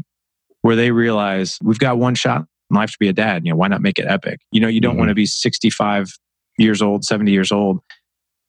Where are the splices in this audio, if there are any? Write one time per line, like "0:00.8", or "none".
0:01.6